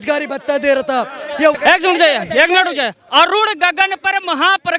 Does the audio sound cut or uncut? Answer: cut